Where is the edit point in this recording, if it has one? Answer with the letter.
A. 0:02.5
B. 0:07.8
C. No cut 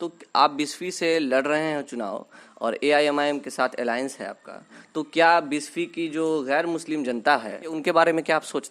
B